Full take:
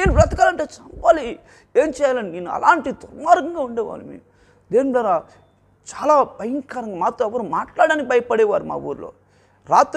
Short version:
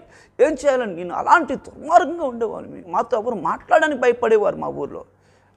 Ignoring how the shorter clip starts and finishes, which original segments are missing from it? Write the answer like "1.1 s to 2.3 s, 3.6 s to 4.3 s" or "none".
4.1 s to 6.8 s

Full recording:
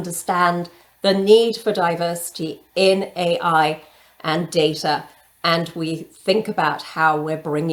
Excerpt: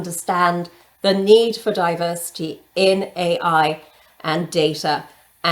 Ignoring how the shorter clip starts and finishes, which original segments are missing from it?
none

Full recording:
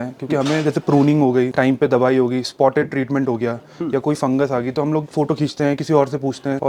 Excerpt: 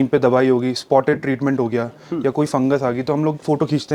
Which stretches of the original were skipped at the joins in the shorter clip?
none

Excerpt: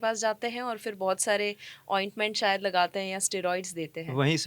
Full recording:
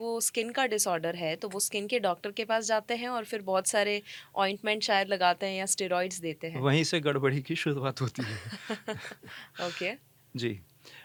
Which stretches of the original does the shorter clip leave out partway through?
none

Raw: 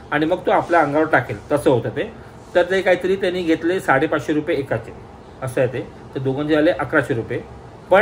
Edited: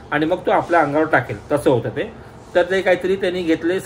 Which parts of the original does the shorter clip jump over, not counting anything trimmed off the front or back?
none

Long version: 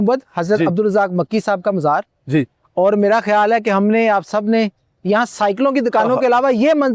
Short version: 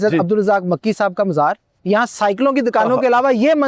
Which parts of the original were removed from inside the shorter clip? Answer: 2.1 s to 4.9 s

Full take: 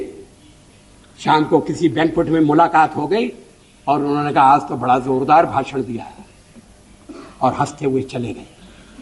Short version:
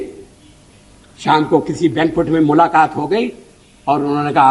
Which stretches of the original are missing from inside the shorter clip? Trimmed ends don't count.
none

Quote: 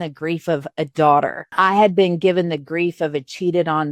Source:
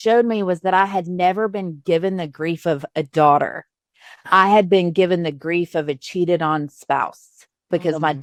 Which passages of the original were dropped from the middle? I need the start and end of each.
3.6 s to 4.2 s

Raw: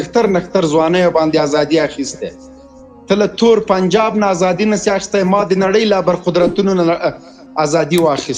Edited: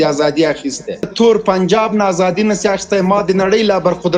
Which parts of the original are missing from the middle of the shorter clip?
2.4 s to 3.3 s

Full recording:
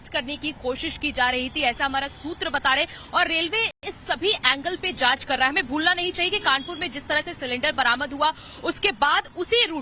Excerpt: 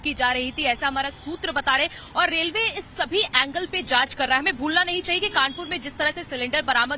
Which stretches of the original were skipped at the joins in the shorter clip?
3.8 s to 3.9 s

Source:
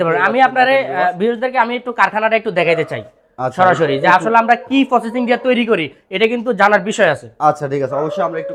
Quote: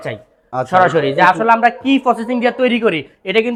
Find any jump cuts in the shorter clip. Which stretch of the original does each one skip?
none

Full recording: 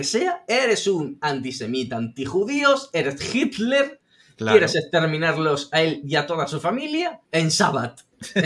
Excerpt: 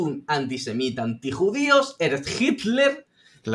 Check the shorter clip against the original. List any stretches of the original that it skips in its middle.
none

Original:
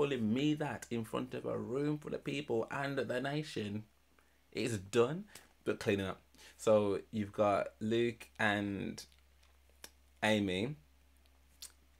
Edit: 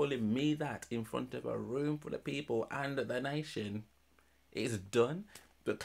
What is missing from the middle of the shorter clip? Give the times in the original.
none

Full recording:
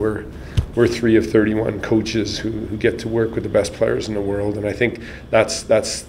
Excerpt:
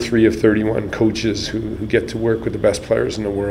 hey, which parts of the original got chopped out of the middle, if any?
none

